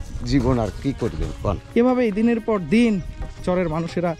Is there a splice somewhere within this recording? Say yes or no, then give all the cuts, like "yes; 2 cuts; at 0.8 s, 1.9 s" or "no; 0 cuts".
yes; 1 cut; at 1.6 s